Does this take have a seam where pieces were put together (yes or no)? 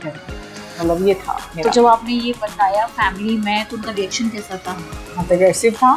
no